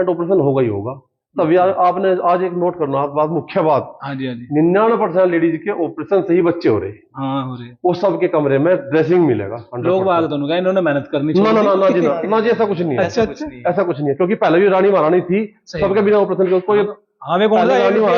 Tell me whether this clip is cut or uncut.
uncut